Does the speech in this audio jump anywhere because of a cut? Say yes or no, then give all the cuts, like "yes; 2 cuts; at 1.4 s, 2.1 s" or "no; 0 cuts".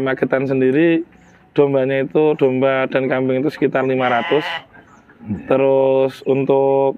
no; 0 cuts